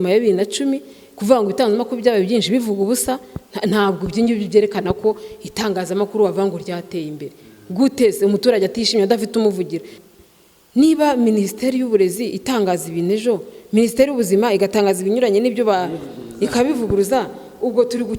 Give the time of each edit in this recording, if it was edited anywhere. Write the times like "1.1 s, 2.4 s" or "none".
10.0 s

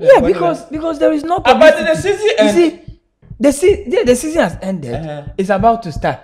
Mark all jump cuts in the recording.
none

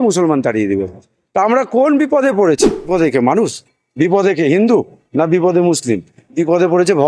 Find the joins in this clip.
2.9 s

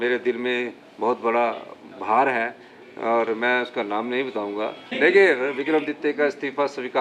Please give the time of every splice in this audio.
5.0 s

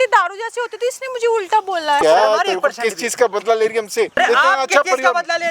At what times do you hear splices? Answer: 2.0 s, 4.2 s

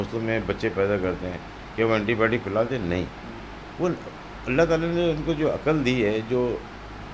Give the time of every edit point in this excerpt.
none

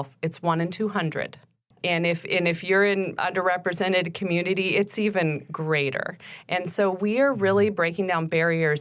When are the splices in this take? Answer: 1.7 s

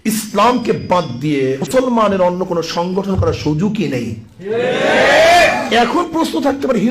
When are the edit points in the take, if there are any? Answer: 1.6 s

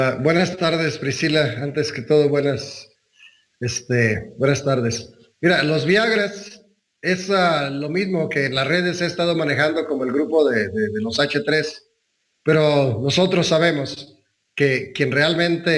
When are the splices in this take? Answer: 12.3 s

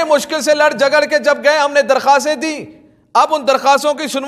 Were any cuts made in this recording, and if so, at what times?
none

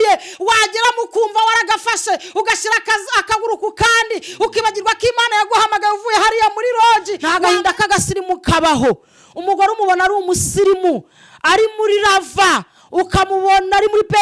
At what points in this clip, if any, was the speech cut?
7.2 s

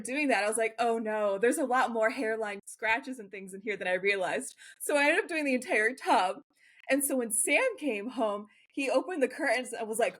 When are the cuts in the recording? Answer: 2.7 s

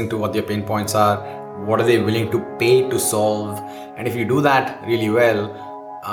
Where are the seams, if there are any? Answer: none

